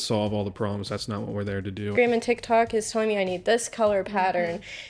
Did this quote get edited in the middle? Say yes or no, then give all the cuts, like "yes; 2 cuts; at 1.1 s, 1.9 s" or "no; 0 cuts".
yes; 1 cut; at 1.9 s